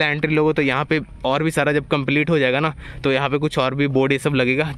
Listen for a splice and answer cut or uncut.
uncut